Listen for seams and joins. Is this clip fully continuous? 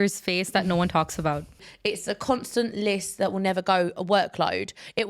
no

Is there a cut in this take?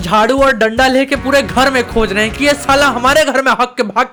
no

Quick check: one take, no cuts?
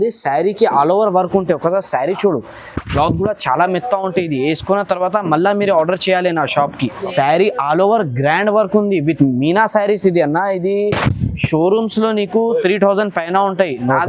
no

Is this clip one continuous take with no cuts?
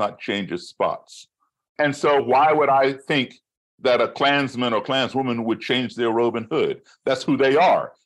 no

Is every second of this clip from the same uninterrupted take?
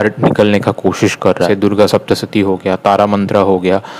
no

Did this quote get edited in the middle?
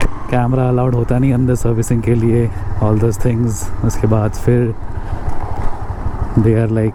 no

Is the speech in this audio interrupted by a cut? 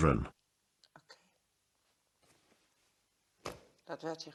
no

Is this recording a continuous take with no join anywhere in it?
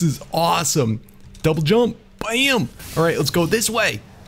yes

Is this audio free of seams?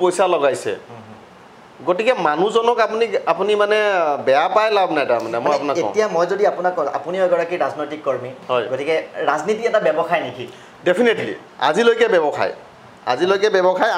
yes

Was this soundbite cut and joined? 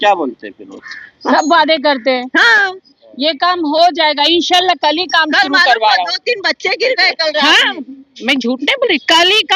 no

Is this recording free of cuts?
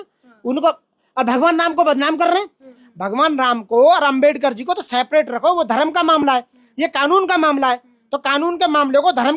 no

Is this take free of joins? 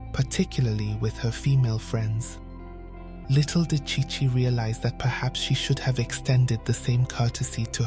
no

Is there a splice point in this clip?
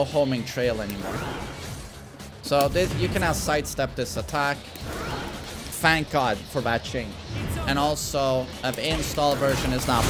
no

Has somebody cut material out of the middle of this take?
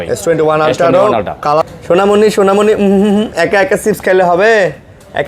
yes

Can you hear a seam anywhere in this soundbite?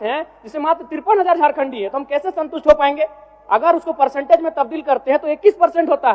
no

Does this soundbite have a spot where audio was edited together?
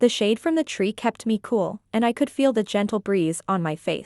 yes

